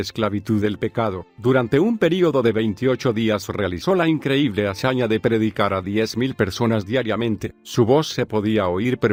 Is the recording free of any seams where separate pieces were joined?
yes; 0 cuts

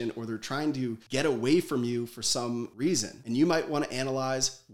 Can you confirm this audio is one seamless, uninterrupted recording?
no; 1 cut; at 3.0 s

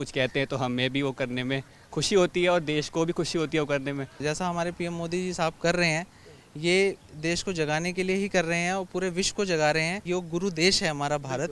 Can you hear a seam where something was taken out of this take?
yes; 2 cuts; at 4.2 s, 10.0 s

